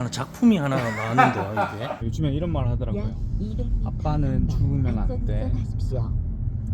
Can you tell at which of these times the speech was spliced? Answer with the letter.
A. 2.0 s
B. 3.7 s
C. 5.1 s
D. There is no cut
A